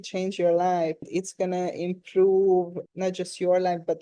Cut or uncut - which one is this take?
cut